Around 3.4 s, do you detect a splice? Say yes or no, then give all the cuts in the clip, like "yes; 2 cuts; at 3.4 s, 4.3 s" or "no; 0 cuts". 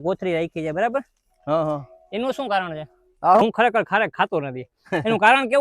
yes; 1 cut; at 3.4 s